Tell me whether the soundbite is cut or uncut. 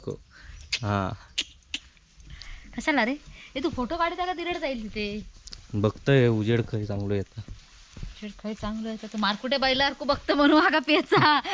uncut